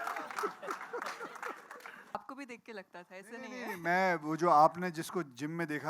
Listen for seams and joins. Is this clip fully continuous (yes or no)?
no